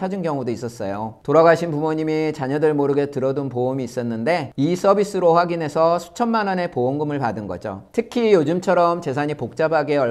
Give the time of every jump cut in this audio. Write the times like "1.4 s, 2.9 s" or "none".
none